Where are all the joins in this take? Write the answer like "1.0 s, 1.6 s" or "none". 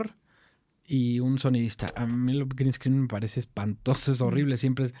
2.0 s